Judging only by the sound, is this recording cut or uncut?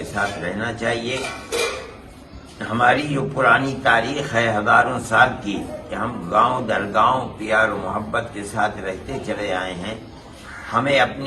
uncut